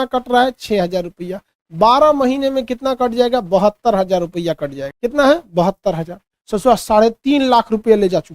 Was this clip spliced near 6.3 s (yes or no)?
yes